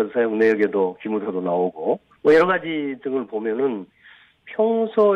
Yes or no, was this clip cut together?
no